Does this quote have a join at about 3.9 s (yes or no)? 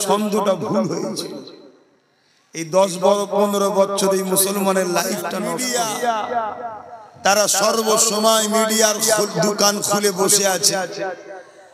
no